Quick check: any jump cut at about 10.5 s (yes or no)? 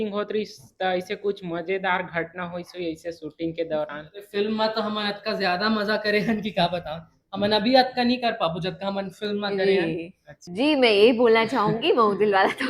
yes